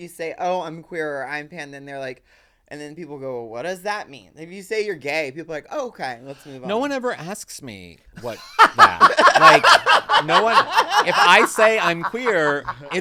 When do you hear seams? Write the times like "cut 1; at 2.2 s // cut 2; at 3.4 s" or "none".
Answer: none